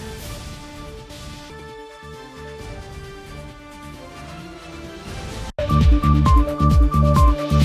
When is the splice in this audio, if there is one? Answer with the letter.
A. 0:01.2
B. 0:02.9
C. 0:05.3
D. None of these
D